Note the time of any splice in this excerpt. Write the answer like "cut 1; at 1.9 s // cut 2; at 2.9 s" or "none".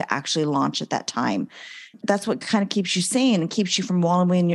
none